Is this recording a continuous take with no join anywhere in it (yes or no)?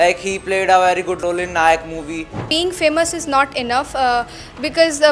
no